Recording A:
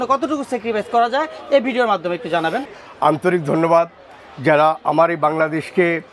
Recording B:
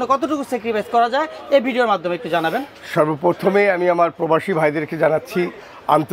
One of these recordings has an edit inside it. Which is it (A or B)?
A